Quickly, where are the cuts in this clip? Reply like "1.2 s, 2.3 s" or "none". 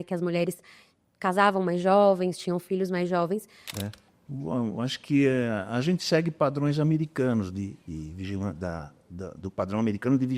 3.6 s